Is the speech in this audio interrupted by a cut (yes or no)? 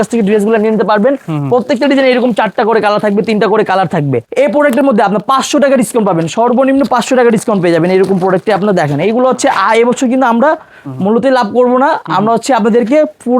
yes